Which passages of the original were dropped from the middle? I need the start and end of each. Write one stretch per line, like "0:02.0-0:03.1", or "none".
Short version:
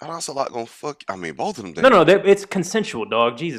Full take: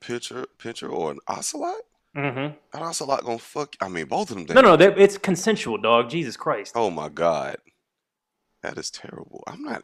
none